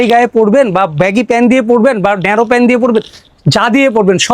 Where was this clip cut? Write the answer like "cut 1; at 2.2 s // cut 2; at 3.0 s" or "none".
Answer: none